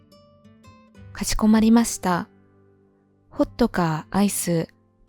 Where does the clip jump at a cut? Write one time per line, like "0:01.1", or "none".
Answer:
0:01.1